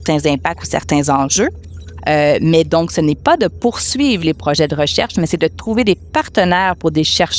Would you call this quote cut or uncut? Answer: uncut